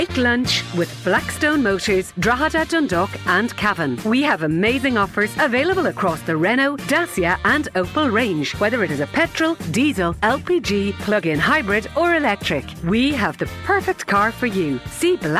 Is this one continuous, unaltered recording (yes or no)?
yes